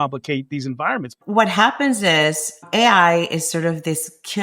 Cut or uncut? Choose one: cut